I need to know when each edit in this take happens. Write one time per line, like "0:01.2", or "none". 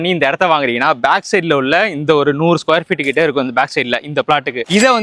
none